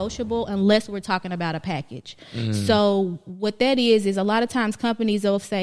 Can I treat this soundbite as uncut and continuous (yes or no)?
yes